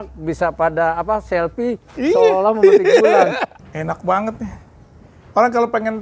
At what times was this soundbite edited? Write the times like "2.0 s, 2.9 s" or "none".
3.6 s